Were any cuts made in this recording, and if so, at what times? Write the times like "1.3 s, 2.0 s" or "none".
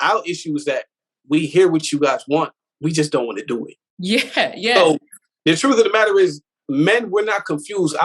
none